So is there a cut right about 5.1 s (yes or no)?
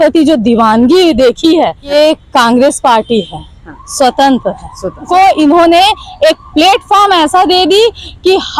yes